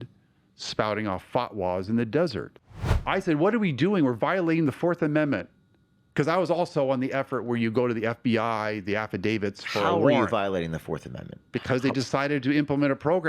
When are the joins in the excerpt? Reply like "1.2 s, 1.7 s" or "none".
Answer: 2.8 s